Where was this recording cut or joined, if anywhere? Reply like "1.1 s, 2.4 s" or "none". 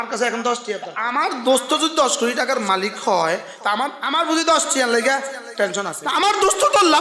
0.9 s, 4.0 s, 6.0 s